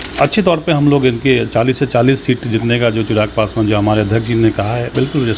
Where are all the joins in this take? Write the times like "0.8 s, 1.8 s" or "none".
none